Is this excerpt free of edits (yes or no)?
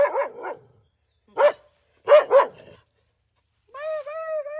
yes